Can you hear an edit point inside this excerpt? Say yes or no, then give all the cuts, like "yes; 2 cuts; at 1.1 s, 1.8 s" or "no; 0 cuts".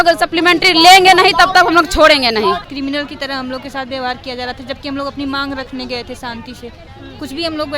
yes; 1 cut; at 2.7 s